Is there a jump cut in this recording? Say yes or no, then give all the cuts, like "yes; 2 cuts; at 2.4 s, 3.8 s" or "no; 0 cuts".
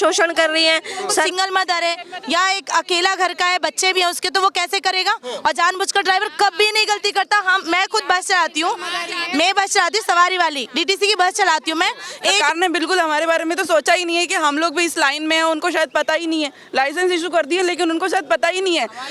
yes; 2 cuts; at 1.3 s, 12.4 s